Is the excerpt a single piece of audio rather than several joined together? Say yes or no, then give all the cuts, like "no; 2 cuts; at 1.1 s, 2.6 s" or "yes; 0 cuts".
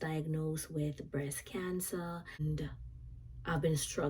no; 1 cut; at 2.4 s